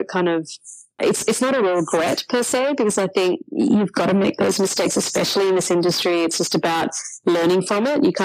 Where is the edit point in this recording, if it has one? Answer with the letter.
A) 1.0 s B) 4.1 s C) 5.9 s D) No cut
A